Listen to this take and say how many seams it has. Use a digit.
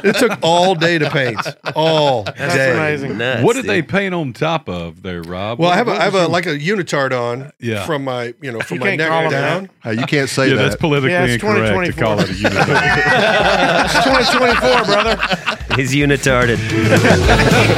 0